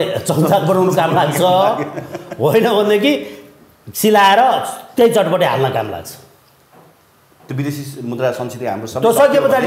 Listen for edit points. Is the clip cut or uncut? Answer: uncut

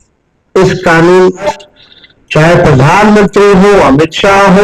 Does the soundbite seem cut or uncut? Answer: cut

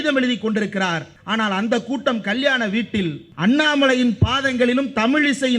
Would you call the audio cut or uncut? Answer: cut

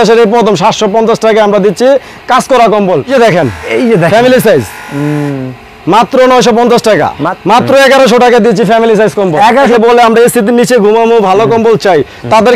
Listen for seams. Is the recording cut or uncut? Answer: cut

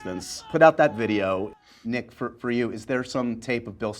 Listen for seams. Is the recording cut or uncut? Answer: cut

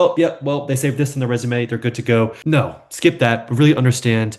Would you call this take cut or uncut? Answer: uncut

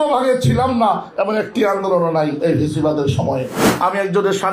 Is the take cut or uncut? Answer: cut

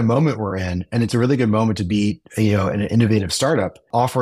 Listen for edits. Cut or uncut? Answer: uncut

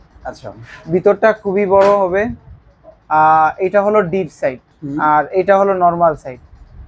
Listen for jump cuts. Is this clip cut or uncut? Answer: uncut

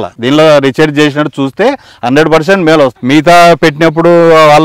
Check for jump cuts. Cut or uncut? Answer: cut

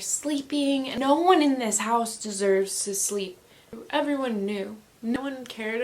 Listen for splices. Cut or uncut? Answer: cut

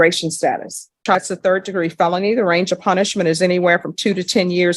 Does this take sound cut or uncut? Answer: cut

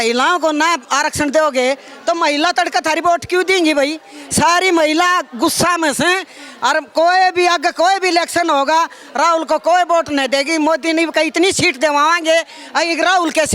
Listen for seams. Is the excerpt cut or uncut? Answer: uncut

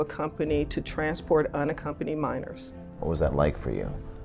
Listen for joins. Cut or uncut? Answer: cut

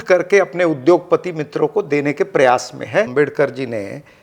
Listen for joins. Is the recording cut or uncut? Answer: cut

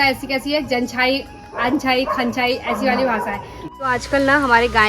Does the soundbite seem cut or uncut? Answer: cut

